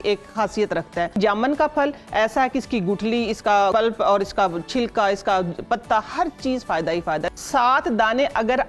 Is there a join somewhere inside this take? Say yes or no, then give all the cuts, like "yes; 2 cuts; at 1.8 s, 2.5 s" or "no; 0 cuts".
yes; 3 cuts; at 1.2 s, 3.7 s, 7.3 s